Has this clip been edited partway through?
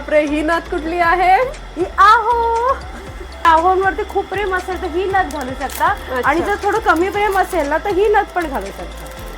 yes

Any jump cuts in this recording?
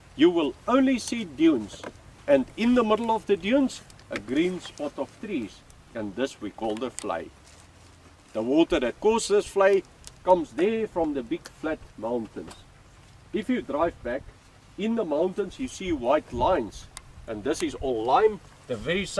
yes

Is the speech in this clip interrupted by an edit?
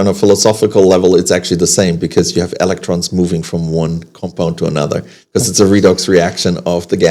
no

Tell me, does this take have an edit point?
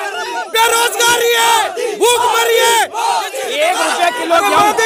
no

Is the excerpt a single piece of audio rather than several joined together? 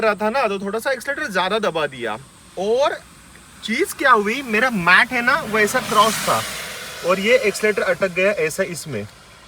yes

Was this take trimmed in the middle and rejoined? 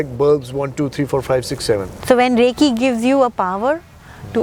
yes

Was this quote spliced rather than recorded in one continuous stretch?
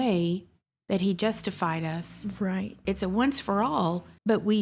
yes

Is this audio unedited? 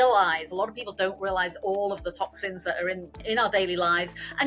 no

